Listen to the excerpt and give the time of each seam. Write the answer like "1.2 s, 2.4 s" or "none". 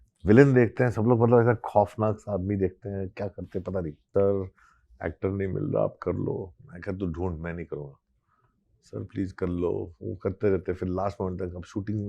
4.1 s